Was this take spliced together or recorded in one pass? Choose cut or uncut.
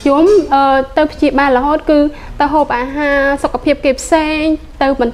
uncut